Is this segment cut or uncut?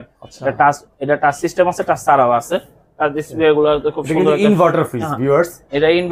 uncut